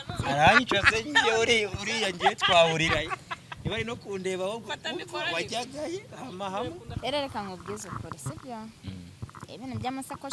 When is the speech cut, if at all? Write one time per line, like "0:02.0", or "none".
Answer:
0:07.0